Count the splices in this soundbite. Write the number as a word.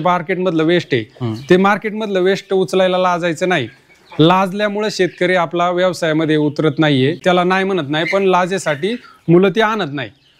one